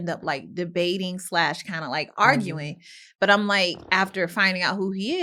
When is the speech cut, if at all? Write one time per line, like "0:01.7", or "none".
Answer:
none